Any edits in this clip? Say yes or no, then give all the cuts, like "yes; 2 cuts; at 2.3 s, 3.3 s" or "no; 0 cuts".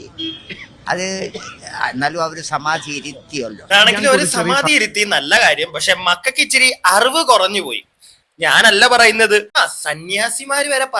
yes; 1 cut; at 9.5 s